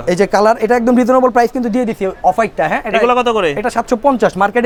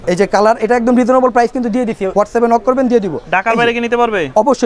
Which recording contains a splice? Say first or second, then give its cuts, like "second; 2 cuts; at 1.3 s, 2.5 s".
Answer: second; 1 cut; at 2.0 s